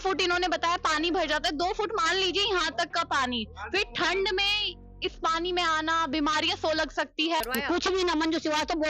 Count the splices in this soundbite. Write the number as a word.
one